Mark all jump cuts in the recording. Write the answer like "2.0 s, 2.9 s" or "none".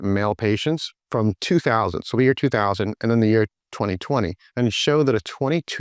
0.9 s, 4.4 s